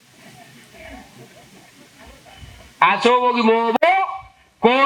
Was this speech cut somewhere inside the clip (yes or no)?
no